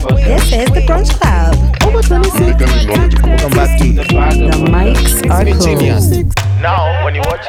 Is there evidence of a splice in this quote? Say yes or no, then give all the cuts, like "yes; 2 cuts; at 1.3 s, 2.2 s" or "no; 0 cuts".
no; 0 cuts